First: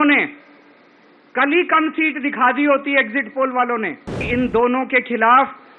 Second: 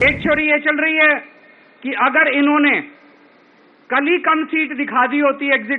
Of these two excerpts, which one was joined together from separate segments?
first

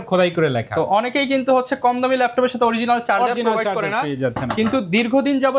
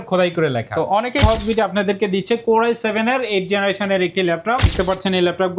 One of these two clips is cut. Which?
second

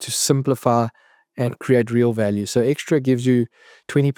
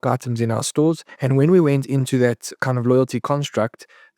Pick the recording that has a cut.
second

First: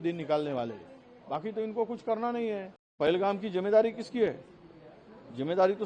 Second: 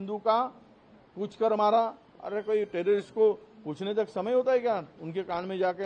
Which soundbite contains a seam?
first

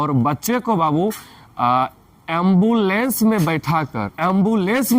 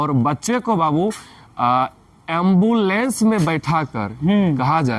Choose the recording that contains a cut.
first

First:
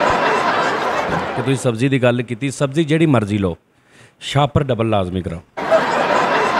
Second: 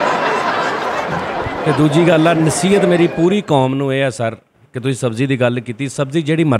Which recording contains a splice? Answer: first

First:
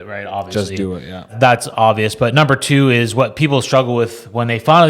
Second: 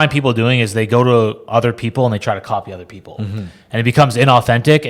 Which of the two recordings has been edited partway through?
first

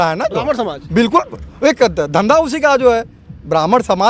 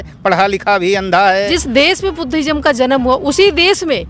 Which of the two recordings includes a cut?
second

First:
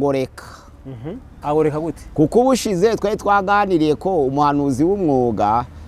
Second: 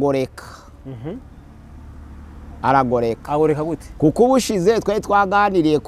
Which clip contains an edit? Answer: first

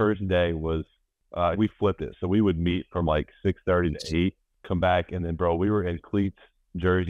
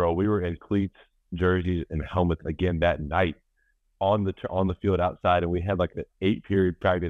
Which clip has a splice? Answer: first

